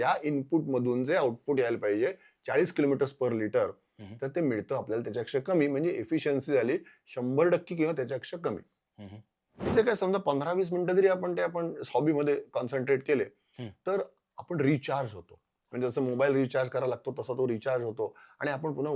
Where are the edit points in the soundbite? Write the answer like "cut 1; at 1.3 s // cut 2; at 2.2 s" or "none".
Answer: cut 1; at 9.7 s